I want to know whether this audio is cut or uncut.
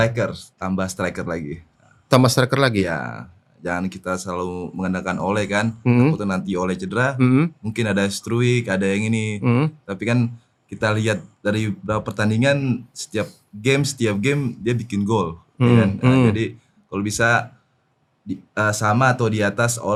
uncut